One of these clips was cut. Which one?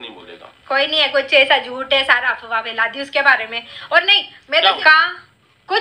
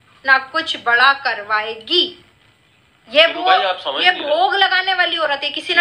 first; 1 cut; at 4.8 s

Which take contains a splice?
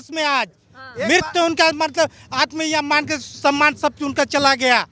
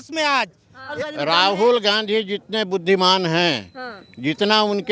second; 1 cut; at 1.0 s

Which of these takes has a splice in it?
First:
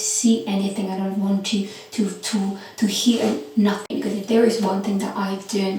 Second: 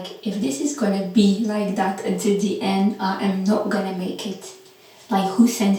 first; 1 cut; at 3.8 s

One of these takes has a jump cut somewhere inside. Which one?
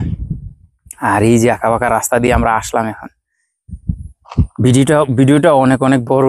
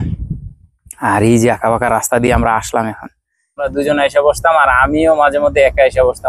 second; 1 cut; at 3.7 s

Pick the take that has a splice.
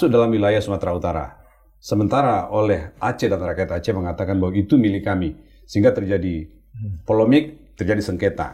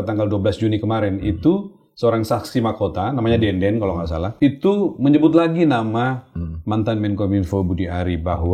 second; 1 cut; at 4.2 s

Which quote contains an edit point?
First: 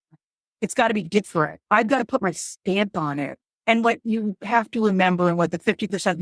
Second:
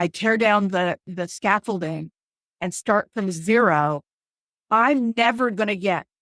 first; 1 cut; at 3.4 s

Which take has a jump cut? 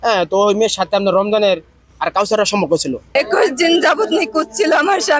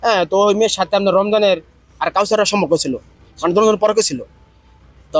first; 1 cut; at 3.0 s

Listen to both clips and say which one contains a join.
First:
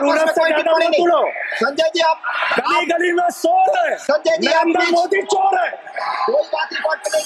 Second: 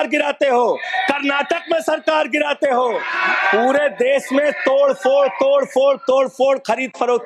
second; 1 cut; at 3.1 s

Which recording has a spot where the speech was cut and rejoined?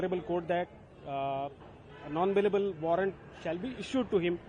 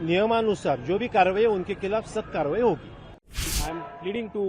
second; 1 cut; at 3.5 s

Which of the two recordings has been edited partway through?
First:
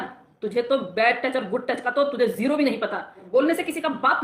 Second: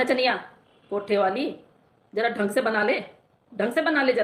first; 1 cut; at 3.2 s

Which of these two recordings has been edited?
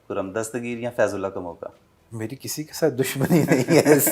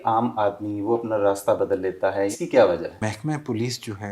second; 2 cuts; at 2.3 s, 3.1 s

